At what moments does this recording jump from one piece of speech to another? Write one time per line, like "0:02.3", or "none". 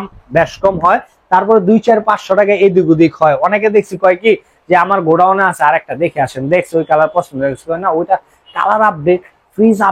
none